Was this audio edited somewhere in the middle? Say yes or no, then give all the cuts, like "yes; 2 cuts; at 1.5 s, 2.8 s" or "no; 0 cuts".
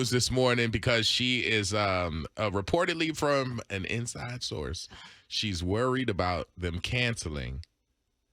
no; 0 cuts